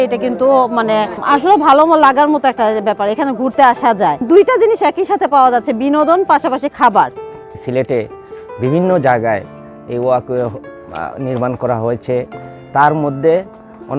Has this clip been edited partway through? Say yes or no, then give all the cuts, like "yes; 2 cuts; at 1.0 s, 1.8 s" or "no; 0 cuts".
yes; 3 cuts; at 1.2 s, 4.2 s, 7.5 s